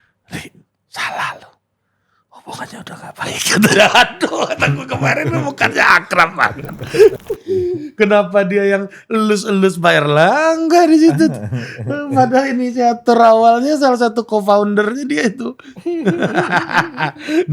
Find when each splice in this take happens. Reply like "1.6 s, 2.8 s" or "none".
7.2 s